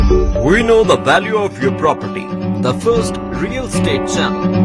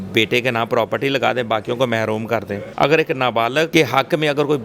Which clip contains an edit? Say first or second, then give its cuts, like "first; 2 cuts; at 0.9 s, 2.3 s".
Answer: second; 2 cuts; at 2.6 s, 3.7 s